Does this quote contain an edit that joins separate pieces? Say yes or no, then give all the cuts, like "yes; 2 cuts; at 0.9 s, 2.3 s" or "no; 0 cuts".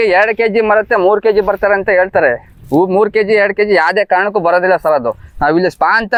no; 0 cuts